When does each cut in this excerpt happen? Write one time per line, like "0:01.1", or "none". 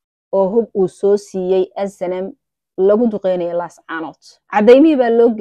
none